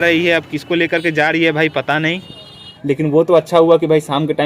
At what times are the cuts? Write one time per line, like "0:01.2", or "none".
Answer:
0:02.7